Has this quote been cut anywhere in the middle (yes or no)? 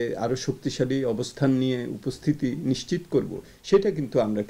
no